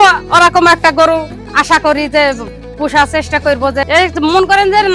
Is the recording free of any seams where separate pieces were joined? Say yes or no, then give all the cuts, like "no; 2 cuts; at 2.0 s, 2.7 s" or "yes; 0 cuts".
yes; 0 cuts